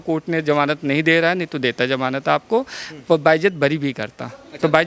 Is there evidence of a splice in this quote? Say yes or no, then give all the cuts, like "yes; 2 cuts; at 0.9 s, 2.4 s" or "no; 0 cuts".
no; 0 cuts